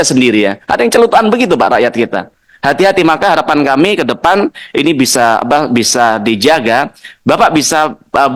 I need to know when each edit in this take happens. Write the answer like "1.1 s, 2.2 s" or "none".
none